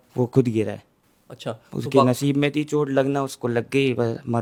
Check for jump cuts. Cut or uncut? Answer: uncut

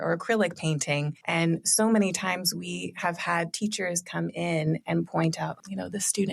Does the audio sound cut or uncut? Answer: cut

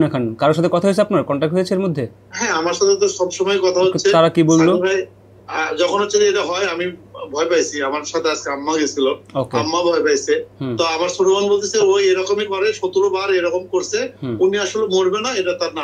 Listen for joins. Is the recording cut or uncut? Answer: uncut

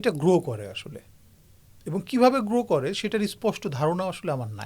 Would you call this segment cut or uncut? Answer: uncut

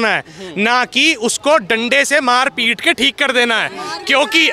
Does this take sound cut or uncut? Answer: uncut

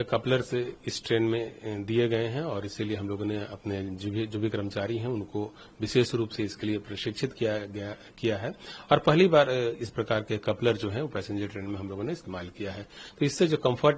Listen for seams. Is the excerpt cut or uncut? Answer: uncut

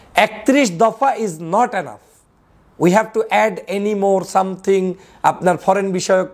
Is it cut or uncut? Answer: uncut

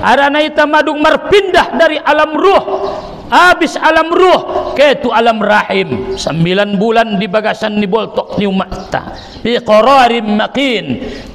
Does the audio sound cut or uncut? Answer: uncut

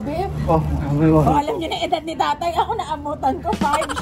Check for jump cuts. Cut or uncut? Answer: uncut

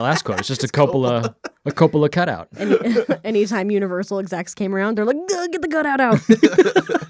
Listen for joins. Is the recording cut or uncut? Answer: uncut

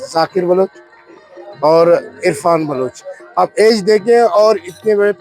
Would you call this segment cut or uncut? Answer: uncut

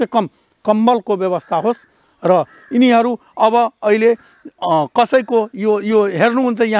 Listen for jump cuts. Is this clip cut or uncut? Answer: uncut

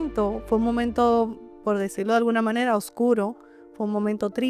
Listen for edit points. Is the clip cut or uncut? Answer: uncut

